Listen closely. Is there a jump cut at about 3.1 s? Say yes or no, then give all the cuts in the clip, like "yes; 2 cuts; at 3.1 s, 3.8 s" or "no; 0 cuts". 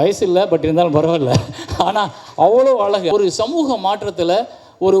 yes; 1 cut; at 3.1 s